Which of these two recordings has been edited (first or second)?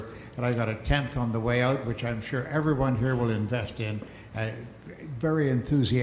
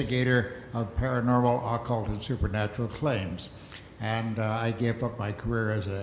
first